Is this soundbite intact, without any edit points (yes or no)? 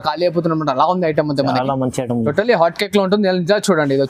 yes